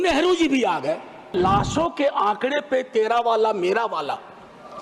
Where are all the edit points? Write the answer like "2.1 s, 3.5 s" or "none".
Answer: 1.3 s